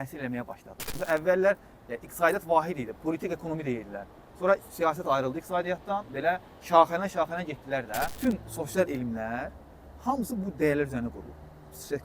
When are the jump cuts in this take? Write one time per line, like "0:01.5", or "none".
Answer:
0:00.9
0:08.1